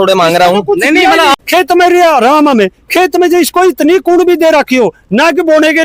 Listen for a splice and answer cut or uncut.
cut